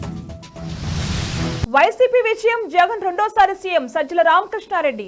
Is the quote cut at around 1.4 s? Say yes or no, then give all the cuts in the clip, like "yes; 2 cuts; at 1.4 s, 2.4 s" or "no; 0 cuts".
yes; 1 cut; at 1.4 s